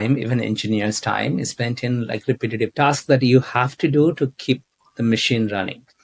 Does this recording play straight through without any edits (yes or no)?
no